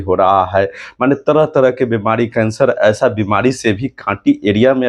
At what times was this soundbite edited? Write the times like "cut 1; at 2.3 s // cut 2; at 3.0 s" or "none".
none